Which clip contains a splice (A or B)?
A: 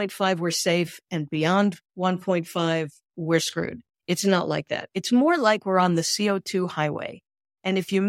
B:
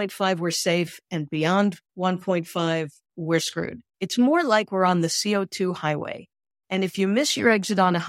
B